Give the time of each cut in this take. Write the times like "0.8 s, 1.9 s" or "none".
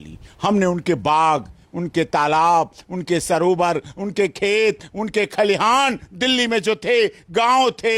none